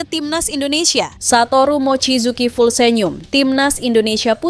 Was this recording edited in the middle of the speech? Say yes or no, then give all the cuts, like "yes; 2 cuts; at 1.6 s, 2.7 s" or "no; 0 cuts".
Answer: yes; 1 cut; at 1.2 s